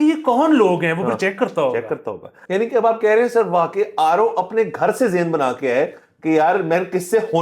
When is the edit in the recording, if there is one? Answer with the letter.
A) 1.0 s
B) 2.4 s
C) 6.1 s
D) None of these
B